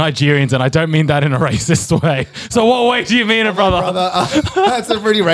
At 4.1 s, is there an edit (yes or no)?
no